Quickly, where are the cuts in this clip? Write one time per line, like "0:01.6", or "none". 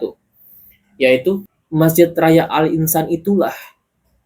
0:01.5